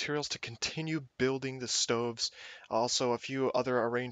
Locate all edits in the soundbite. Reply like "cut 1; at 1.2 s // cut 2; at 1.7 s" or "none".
cut 1; at 3.1 s